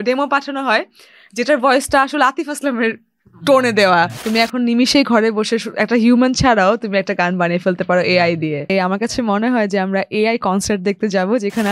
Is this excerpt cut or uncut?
cut